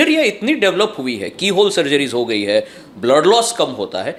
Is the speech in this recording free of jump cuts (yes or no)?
yes